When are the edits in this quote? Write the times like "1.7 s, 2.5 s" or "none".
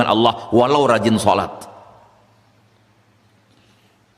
none